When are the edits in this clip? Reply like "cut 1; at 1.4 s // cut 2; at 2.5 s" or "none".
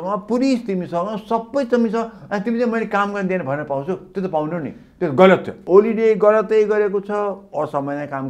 cut 1; at 5.6 s